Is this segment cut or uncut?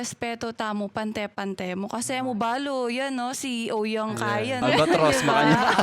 cut